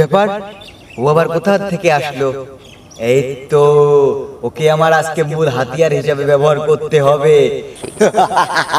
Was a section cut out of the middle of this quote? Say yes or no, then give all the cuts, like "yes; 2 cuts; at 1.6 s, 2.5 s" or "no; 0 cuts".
yes; 1 cut; at 7.8 s